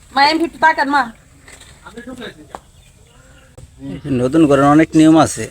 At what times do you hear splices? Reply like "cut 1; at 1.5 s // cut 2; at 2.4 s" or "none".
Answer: cut 1; at 3.6 s